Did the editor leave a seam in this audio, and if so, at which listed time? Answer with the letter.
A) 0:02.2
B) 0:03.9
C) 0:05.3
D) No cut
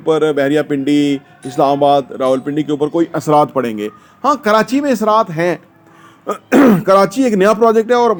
D